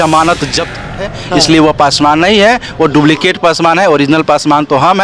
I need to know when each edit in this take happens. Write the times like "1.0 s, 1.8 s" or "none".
1.0 s